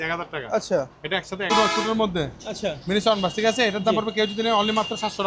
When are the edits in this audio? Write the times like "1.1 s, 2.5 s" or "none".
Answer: 1.5 s